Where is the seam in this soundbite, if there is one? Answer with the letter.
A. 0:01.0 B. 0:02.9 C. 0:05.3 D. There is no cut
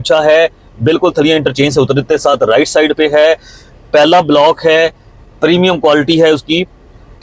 D